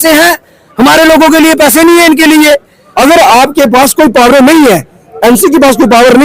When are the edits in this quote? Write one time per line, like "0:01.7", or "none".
0:02.8